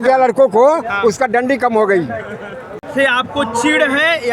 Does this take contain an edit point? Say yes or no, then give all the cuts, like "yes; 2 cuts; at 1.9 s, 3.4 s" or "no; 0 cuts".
no; 0 cuts